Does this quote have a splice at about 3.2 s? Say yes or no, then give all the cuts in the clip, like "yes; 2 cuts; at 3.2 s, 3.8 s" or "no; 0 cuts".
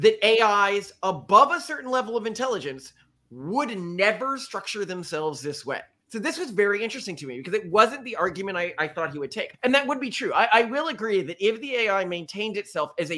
no; 2 cuts; at 6.1 s, 9.5 s